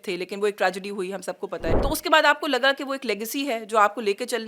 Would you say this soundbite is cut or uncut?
cut